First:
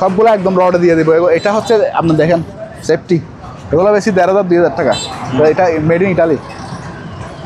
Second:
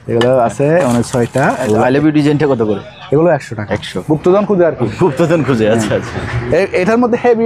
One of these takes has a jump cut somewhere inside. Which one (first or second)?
second